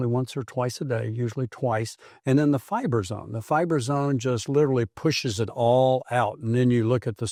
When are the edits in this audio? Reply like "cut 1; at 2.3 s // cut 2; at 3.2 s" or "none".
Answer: none